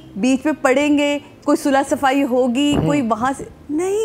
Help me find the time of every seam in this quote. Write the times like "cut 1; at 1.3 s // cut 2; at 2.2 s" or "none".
none